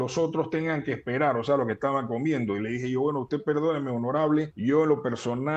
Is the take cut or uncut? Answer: cut